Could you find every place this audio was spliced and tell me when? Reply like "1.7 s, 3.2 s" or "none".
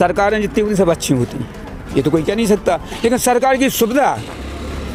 none